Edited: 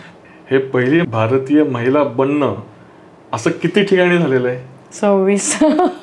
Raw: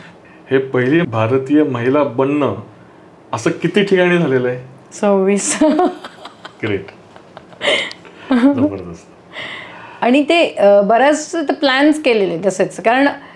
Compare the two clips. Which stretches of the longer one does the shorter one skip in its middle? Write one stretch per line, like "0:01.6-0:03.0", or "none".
none